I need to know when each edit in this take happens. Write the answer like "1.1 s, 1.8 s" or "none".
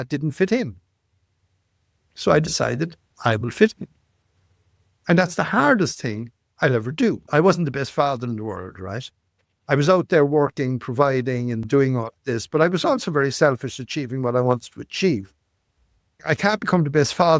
7.2 s, 16.1 s